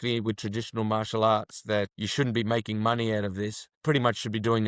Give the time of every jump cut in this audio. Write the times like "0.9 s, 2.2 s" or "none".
1.9 s, 3.7 s